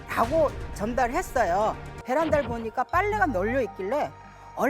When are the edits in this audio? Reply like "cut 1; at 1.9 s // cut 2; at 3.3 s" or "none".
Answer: cut 1; at 1.9 s